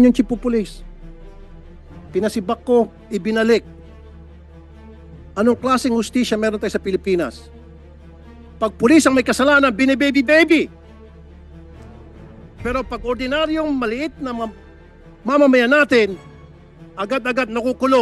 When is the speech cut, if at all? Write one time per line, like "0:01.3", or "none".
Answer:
0:10.7
0:12.6